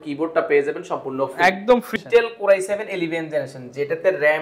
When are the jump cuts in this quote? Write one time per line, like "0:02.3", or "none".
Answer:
0:01.9